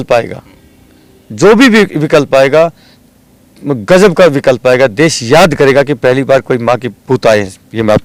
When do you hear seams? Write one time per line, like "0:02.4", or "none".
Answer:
none